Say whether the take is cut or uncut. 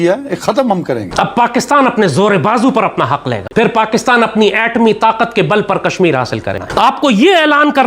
cut